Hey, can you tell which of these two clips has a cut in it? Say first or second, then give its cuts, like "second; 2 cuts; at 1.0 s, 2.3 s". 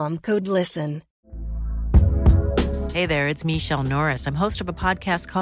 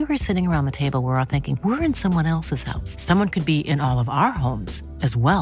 first; 1 cut; at 1.2 s